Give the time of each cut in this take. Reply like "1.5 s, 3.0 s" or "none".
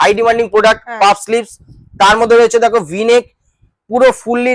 none